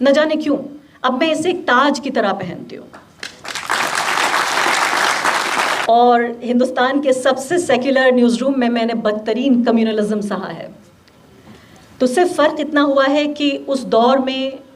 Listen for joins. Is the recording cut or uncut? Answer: cut